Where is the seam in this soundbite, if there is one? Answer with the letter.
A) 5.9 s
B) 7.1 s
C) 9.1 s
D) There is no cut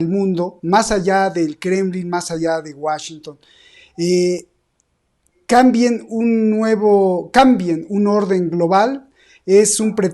D